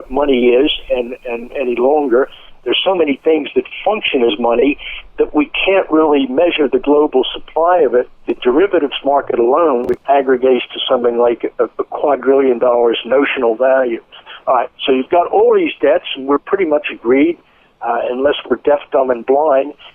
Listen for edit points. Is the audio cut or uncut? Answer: cut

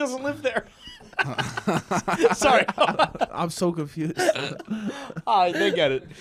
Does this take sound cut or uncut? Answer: uncut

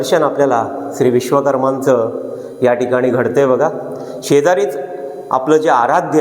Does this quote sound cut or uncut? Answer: uncut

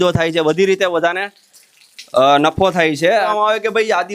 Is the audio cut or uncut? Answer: cut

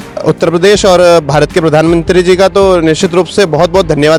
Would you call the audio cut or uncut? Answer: uncut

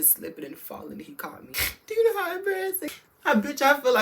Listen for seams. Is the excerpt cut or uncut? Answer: cut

